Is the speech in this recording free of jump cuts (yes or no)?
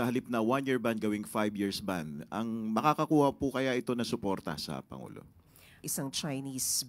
no